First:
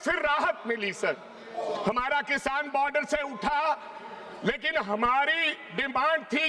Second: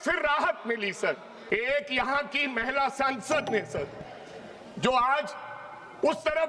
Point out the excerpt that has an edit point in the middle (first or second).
second